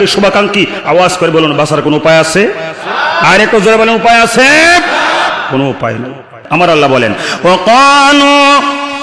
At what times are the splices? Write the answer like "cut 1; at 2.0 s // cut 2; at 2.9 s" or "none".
cut 1; at 6.4 s